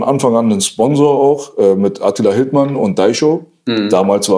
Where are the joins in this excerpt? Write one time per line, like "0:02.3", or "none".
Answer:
none